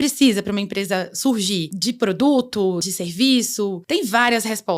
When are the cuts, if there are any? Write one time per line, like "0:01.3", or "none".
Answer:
0:01.7
0:02.8
0:03.8